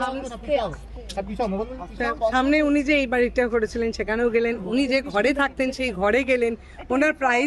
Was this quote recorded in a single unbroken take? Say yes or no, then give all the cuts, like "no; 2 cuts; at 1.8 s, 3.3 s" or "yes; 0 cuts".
yes; 0 cuts